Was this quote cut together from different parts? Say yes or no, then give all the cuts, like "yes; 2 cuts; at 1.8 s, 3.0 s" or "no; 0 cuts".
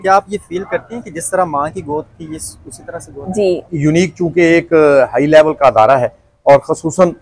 yes; 1 cut; at 3.7 s